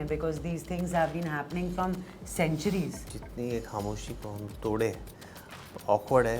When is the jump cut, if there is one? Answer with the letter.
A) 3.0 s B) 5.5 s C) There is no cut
A